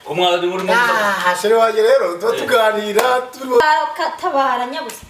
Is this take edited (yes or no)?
yes